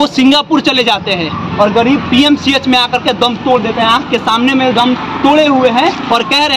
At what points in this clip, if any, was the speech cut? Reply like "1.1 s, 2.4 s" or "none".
none